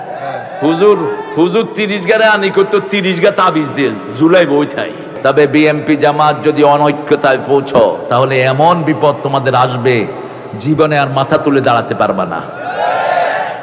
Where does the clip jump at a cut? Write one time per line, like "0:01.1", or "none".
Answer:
0:05.1